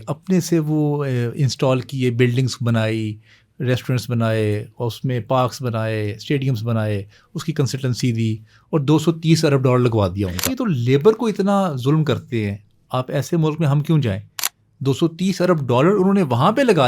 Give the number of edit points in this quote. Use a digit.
1